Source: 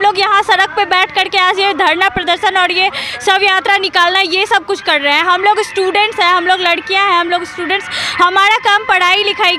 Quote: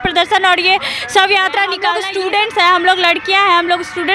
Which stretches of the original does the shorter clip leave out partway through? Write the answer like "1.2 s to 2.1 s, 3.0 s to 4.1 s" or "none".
4.0 s to 5.5 s